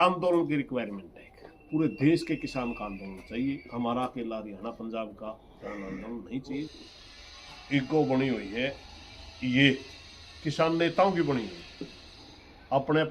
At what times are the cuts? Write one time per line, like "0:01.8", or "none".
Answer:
0:06.7

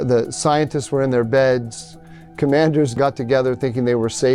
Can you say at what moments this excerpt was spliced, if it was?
0:03.0

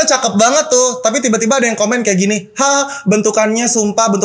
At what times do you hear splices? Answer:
none

